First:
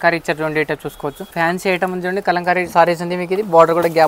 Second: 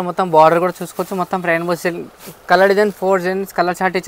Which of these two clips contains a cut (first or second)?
first